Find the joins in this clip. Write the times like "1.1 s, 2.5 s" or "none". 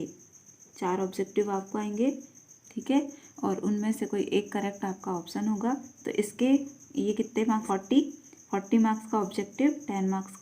7.6 s

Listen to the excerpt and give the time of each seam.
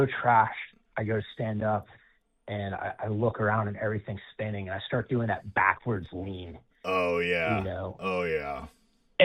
none

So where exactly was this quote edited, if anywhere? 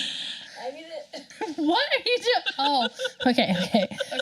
1.3 s

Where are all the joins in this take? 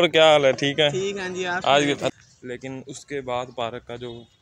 2.2 s

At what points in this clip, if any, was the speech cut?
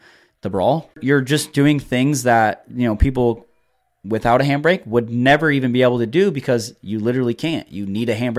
1.0 s

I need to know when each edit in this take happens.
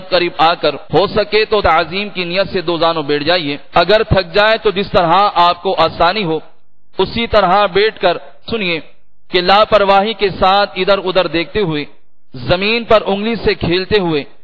0.8 s, 1.6 s, 3.6 s, 8.5 s

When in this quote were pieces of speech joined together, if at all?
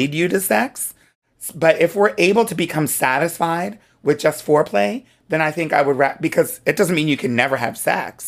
none

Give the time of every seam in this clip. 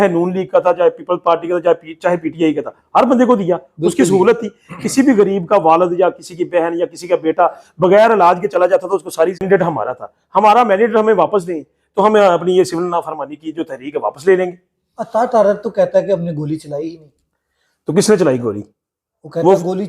9.4 s

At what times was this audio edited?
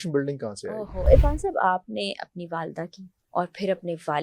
1.1 s

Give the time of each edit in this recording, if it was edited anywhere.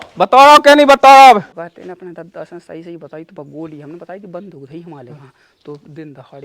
1.5 s

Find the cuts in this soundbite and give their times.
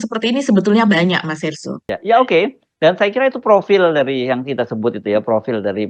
none

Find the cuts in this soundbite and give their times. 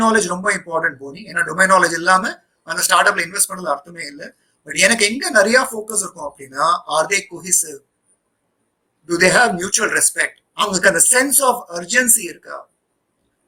none

